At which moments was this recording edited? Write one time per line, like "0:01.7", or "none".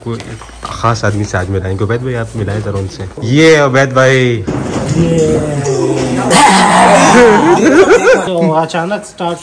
0:03.2
0:06.3
0:08.2